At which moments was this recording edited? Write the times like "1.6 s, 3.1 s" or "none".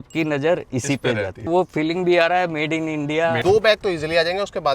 1.5 s, 3.4 s